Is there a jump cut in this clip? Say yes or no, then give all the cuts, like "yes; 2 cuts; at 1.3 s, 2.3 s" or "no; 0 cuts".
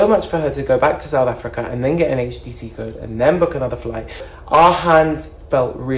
yes; 1 cut; at 4.3 s